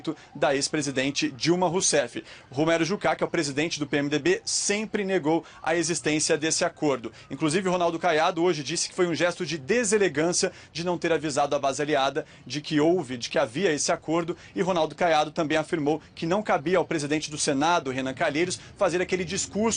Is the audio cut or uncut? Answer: uncut